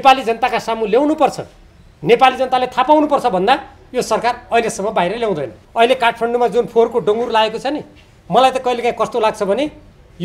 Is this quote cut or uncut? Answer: cut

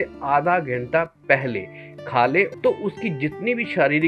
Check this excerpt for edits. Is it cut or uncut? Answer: cut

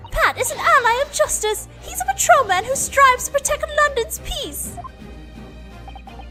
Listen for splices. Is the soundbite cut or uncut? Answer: uncut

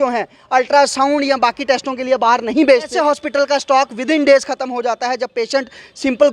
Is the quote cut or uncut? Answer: cut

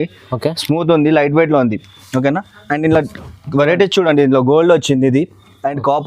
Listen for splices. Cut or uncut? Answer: uncut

